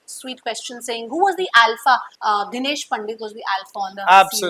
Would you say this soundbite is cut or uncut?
uncut